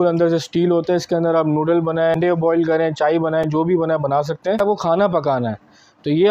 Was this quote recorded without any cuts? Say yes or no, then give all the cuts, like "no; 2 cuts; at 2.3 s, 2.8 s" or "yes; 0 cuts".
no; 2 cuts; at 2.1 s, 4.5 s